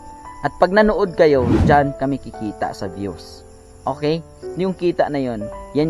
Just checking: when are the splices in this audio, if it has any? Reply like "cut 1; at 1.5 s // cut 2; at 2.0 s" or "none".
cut 1; at 4.4 s